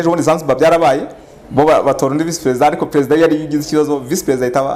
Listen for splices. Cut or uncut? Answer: uncut